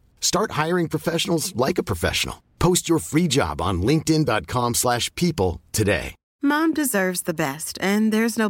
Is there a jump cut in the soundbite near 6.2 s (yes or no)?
yes